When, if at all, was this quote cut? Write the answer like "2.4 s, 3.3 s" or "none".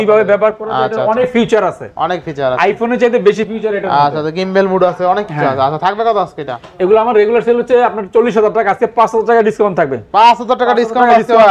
none